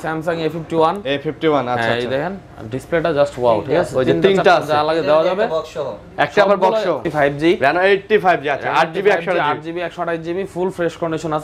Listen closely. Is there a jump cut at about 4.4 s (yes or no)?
no